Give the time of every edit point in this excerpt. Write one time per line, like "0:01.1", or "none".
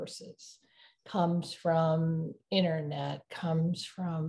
none